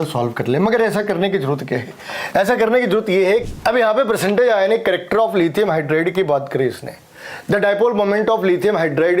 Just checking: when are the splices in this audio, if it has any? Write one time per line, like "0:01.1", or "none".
0:03.4